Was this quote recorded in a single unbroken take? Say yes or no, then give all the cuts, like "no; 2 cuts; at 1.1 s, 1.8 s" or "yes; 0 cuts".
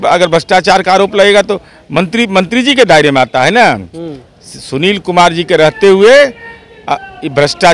yes; 0 cuts